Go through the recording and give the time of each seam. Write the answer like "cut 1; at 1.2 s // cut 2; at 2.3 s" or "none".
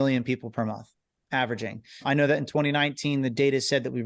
cut 1; at 2.0 s